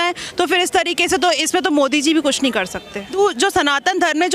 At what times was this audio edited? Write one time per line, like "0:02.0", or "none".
0:03.2